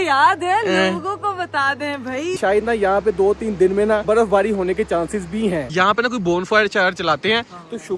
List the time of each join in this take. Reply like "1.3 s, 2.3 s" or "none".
2.3 s, 5.7 s